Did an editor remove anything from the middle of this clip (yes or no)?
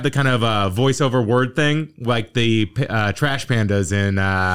no